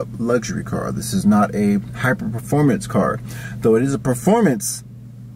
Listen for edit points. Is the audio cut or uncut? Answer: uncut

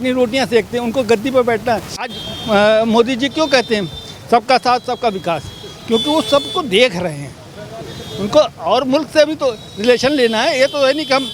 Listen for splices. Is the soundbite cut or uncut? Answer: uncut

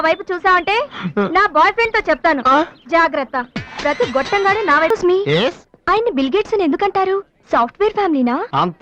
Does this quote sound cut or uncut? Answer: cut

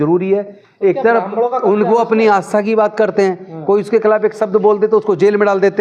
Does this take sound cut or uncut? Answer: uncut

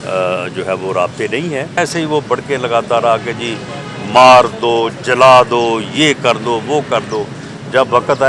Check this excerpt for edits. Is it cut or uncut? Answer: cut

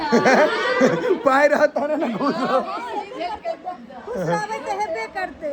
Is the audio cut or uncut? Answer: uncut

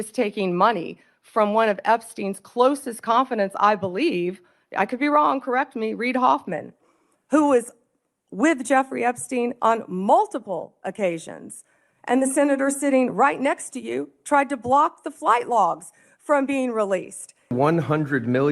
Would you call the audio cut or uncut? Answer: cut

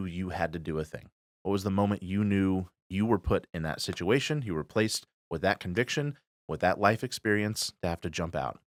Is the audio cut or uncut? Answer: uncut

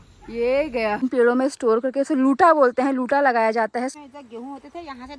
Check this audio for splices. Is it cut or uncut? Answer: cut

